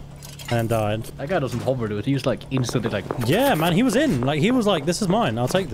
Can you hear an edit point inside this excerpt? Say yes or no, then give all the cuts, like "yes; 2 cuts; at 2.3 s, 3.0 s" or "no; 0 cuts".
yes; 1 cut; at 3.1 s